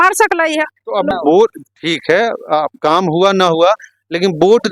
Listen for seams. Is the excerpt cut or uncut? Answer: cut